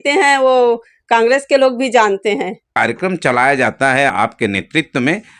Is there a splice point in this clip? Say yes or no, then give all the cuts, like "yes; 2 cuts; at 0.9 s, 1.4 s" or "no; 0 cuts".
yes; 2 cuts; at 2.6 s, 4.1 s